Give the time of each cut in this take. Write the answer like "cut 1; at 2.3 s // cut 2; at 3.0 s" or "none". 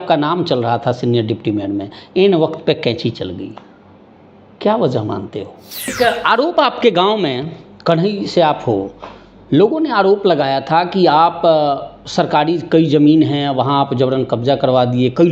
cut 1; at 5.9 s